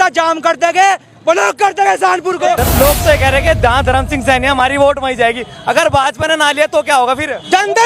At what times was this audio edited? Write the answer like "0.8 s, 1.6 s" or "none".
2.6 s